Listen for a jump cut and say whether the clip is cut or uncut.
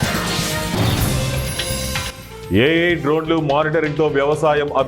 cut